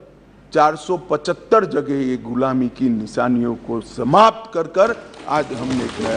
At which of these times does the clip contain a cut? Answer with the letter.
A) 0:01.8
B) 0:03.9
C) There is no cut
C